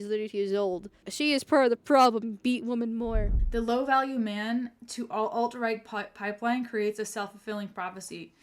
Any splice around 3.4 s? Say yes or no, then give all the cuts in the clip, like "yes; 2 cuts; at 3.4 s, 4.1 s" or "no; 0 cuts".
yes; 2 cuts; at 1.1 s, 3.4 s